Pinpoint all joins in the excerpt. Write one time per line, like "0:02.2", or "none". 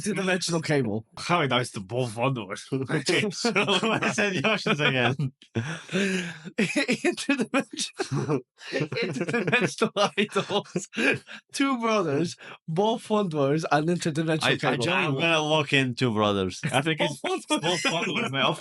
0:01.1